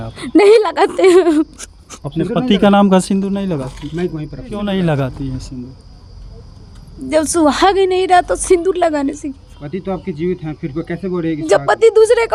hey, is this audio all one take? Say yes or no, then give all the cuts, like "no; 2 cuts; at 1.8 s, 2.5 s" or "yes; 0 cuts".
yes; 0 cuts